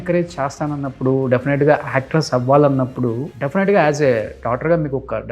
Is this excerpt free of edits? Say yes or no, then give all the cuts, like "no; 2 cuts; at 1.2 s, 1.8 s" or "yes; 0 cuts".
no; 1 cut; at 3.3 s